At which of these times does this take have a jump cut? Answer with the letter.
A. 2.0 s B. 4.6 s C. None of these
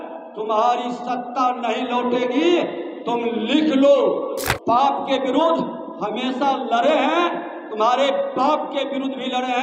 B